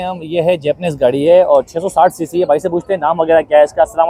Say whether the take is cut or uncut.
uncut